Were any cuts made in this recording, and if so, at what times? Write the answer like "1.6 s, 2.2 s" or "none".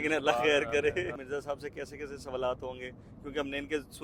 1.2 s